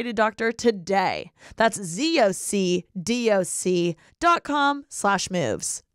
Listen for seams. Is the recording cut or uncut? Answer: uncut